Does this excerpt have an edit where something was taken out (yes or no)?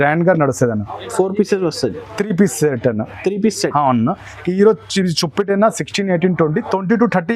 no